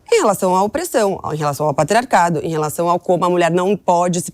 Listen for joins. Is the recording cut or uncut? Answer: uncut